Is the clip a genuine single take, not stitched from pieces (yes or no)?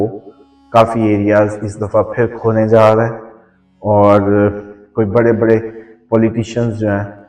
yes